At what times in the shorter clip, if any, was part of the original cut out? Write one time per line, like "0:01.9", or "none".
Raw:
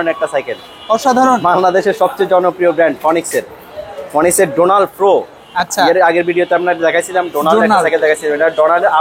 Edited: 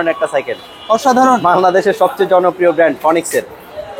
none